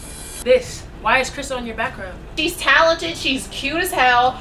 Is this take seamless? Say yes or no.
no